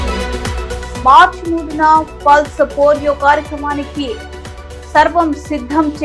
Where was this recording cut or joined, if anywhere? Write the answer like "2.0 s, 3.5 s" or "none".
0.9 s